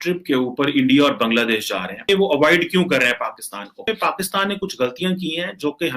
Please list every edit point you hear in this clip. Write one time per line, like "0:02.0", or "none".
0:02.0
0:03.8